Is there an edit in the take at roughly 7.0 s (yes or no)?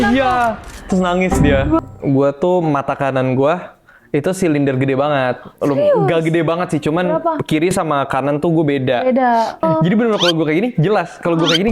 no